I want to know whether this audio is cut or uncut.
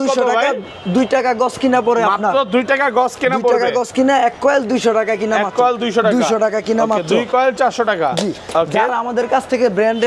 uncut